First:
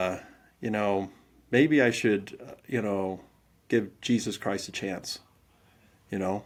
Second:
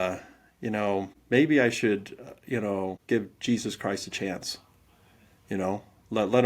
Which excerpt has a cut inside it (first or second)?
second